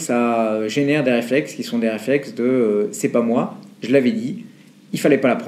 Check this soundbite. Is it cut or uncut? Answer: uncut